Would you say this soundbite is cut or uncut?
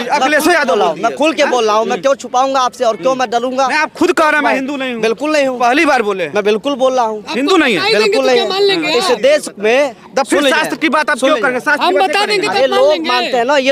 uncut